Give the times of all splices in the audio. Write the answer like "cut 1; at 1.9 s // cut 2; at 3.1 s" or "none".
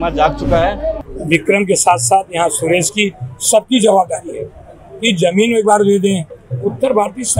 cut 1; at 0.9 s